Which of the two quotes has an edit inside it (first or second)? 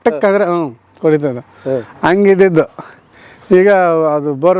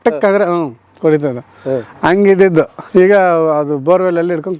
second